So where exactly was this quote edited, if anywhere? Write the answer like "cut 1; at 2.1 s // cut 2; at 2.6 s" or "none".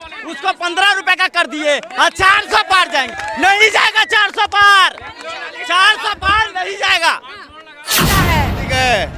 cut 1; at 8.0 s